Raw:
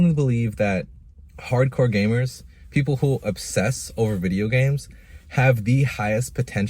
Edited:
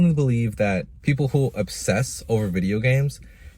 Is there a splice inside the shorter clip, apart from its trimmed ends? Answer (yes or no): yes